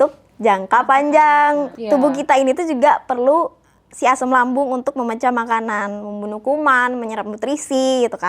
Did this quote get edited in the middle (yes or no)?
yes